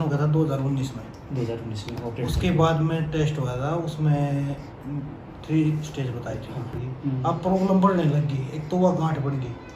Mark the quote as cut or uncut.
cut